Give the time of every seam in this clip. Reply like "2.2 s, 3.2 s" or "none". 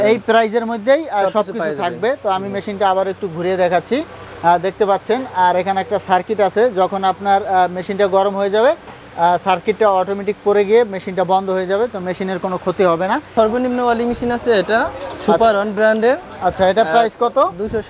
13.3 s